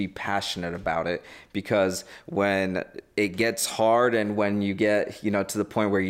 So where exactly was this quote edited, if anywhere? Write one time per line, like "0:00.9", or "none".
none